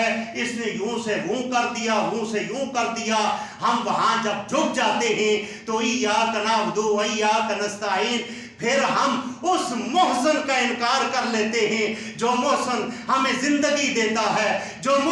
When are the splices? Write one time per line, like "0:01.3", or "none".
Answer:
none